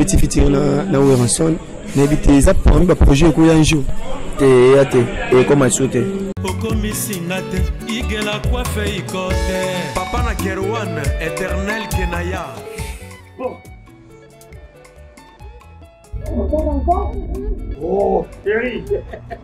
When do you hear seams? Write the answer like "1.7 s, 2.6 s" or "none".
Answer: 6.3 s